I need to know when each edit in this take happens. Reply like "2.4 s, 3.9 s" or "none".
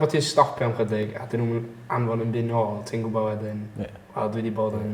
none